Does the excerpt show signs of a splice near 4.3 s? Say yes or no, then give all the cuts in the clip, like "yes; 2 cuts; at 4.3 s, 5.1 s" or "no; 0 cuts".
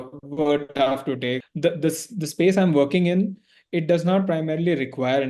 no; 1 cut; at 1.4 s